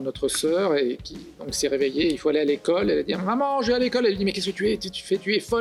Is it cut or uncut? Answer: uncut